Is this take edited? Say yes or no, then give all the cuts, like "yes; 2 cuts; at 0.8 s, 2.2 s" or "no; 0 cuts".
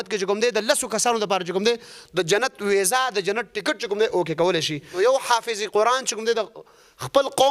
yes; 1 cut; at 4.8 s